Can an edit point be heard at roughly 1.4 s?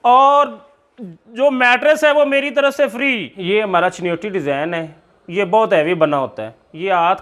no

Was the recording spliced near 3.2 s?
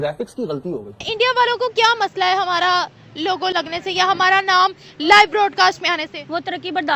no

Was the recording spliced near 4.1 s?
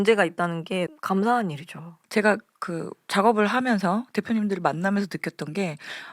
no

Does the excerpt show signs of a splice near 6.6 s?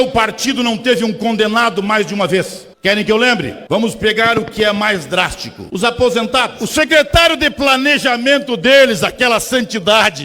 yes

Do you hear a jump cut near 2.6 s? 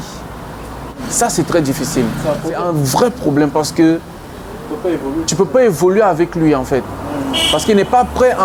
yes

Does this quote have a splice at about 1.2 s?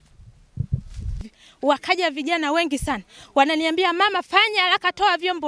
yes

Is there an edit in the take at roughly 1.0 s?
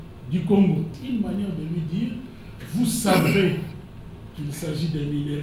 yes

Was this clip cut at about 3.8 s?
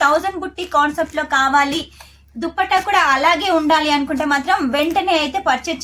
no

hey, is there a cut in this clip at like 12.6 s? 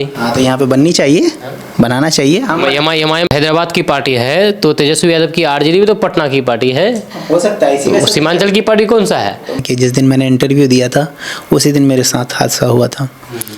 no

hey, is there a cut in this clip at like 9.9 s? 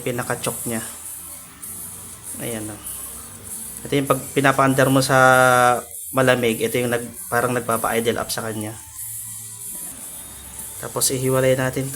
yes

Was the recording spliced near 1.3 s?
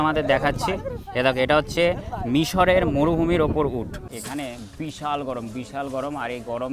no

